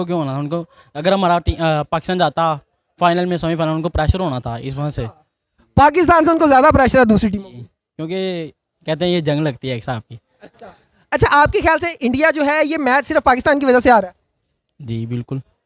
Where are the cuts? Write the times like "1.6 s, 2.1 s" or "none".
none